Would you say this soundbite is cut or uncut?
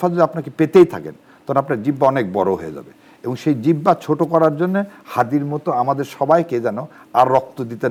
uncut